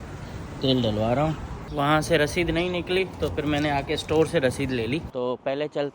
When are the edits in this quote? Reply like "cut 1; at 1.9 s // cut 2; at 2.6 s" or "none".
cut 1; at 1.6 s // cut 2; at 5.1 s